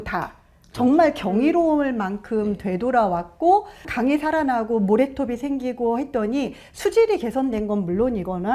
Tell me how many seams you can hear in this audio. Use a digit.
1